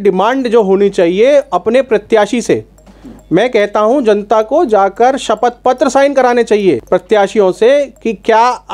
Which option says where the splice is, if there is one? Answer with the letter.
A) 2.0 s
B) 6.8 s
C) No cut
B